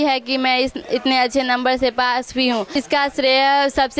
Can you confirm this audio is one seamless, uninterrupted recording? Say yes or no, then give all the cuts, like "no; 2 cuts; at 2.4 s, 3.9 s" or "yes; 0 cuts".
yes; 0 cuts